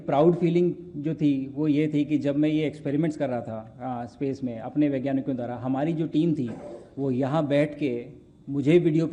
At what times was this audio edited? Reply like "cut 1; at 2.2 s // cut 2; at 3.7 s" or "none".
none